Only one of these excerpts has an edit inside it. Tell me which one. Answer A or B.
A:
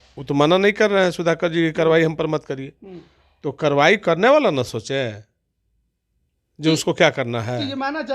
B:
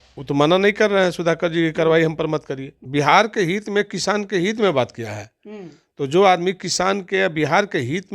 B